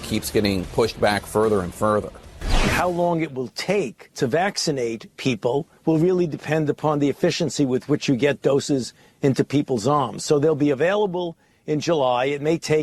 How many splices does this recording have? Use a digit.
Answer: 0